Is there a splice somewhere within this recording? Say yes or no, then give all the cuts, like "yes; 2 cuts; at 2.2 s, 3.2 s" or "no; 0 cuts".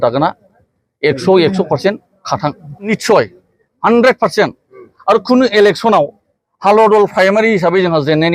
yes; 1 cut; at 2.9 s